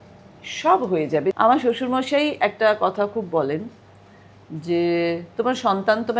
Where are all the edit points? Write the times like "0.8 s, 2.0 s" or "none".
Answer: 1.4 s

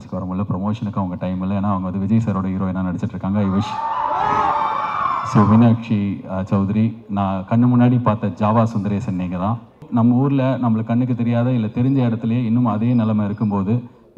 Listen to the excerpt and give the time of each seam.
9.8 s

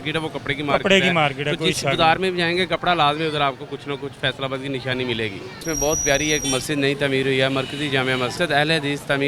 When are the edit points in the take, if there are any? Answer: 5.5 s

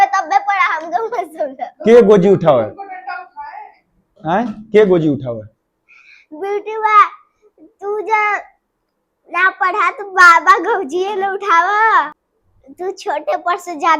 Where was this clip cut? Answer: 12.1 s

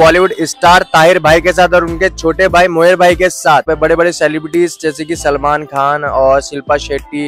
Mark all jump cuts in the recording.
3.7 s

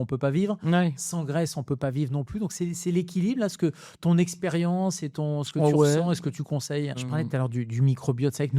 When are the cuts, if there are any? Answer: none

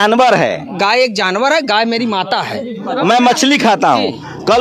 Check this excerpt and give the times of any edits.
2.8 s

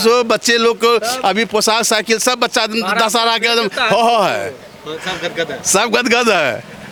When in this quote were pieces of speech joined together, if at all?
none

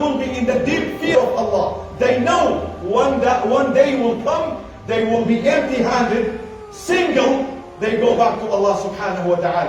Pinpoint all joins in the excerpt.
1.1 s

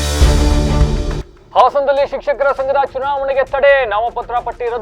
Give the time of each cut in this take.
1.3 s

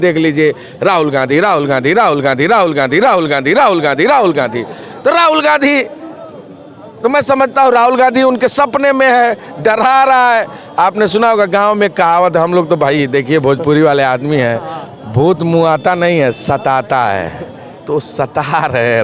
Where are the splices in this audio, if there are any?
none

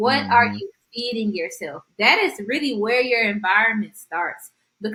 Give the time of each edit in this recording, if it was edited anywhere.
none

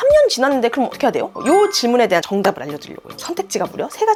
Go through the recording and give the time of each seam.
none

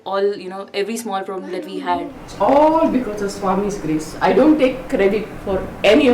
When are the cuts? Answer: 2.2 s

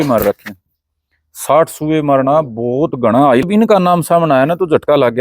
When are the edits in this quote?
3.5 s

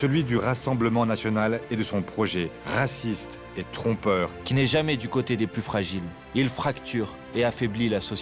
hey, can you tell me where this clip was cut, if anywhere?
2.6 s, 6.2 s, 7.2 s

